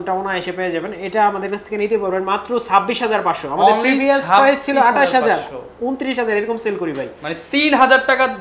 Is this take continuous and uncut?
yes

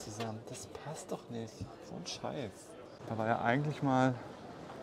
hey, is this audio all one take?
no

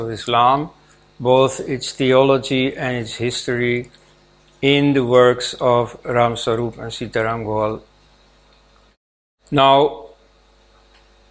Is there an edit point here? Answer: no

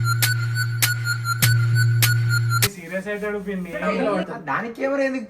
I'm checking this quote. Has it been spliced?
yes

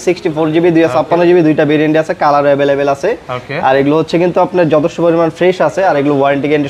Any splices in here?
no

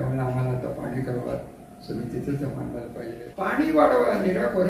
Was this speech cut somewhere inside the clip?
yes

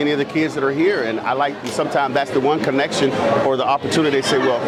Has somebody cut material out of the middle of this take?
no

